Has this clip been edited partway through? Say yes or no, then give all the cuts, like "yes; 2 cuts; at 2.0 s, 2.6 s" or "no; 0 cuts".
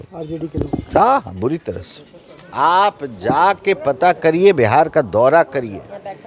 yes; 1 cut; at 2.5 s